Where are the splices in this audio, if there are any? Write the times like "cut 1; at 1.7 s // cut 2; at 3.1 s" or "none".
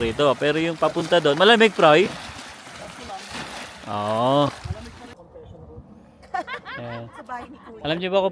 cut 1; at 5.2 s